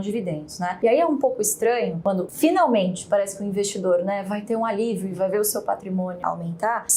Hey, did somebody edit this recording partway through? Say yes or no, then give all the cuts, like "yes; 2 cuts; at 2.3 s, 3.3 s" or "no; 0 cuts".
no; 0 cuts